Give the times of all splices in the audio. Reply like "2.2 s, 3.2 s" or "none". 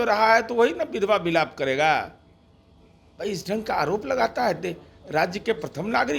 none